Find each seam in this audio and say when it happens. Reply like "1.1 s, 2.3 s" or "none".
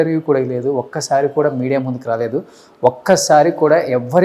none